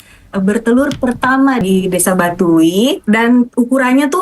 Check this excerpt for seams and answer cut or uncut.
cut